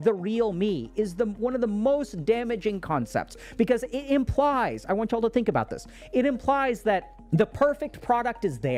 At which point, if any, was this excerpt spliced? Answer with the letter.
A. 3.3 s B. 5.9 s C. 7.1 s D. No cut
D